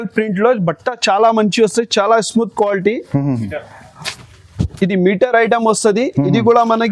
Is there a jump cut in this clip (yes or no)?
no